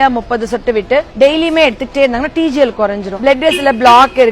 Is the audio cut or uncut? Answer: cut